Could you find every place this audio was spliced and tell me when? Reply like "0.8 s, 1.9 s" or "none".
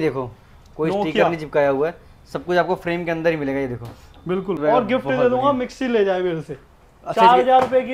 4.6 s